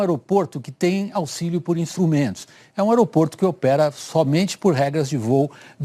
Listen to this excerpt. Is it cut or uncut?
uncut